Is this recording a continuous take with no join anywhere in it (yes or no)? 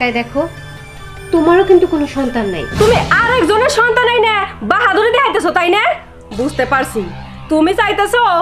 no